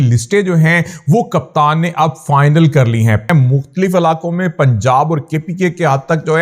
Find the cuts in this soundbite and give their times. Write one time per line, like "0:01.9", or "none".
0:03.3